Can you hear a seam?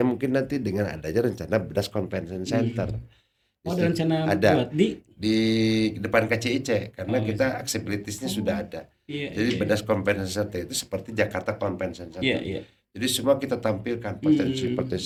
no; 0 cuts

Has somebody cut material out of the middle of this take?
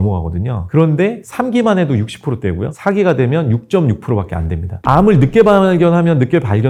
no; 0 cuts

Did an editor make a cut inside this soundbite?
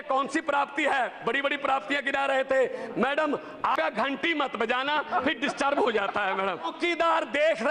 yes; 2 cuts; at 3.8 s, 6.7 s

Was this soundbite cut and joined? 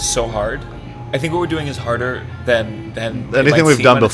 no; 0 cuts

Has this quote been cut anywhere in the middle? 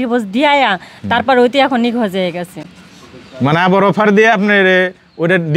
no; 0 cuts

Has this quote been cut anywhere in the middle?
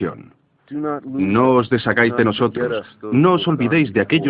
yes; 1 cut; at 3.4 s

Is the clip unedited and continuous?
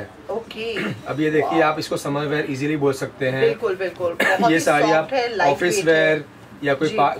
yes; 0 cuts

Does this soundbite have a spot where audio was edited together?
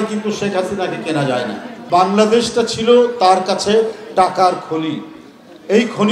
yes; 1 cut; at 1.8 s

